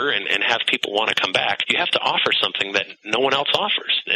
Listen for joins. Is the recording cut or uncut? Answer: cut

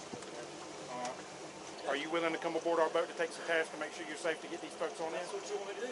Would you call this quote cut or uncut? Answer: cut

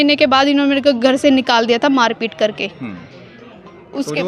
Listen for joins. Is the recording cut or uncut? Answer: uncut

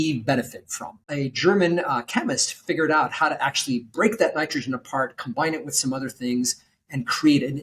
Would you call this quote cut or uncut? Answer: cut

